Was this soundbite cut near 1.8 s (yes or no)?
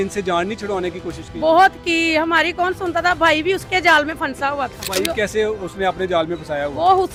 no